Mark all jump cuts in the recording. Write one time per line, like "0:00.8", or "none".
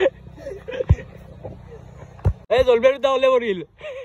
0:02.4